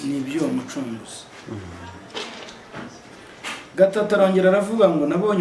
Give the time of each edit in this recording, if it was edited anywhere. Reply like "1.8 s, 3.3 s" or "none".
none

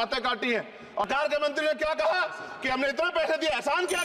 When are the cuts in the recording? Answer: 1.1 s

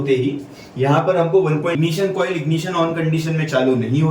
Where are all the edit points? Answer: 1.8 s

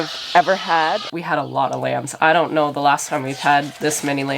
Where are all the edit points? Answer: 1.1 s

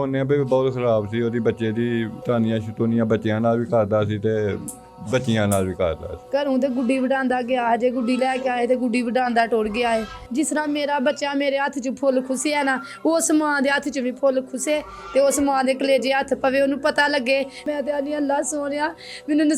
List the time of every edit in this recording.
2.1 s, 6.1 s, 10.2 s, 17.6 s

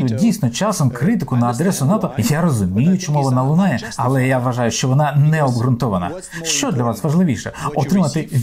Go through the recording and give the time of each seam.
none

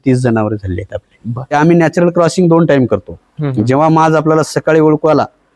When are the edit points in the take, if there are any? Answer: 1.5 s

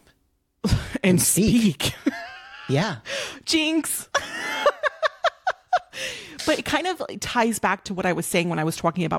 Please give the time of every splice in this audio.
none

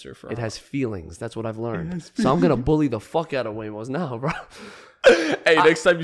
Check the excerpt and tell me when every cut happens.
none

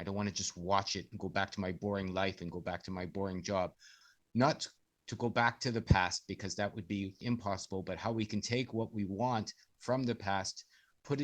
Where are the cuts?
4.0 s, 7.2 s

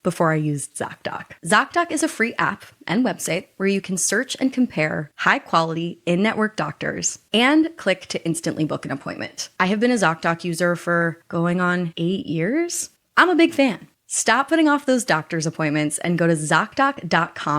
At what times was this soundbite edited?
9.5 s, 12.8 s

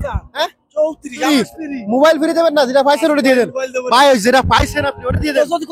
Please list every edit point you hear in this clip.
1.3 s

